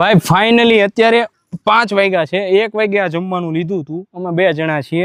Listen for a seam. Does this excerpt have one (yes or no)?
no